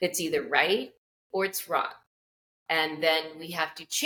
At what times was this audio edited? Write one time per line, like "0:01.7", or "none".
none

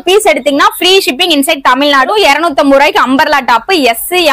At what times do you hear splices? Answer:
0:02.1

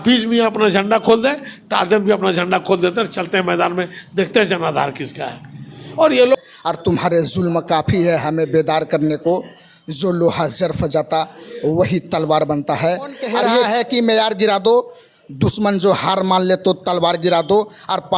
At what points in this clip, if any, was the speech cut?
0:06.3
0:13.7

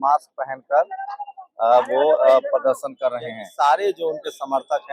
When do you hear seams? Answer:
0:03.4

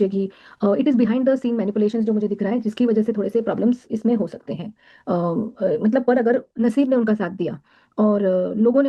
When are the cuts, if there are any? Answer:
0:04.4

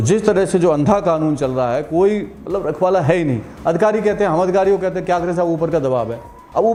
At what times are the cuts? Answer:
none

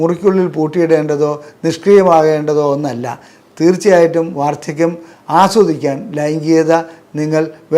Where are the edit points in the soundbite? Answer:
none

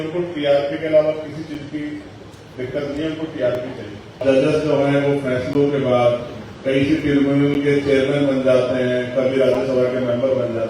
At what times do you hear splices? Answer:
0:04.2

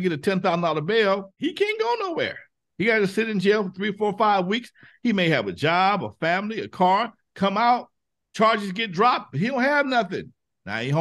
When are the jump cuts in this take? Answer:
none

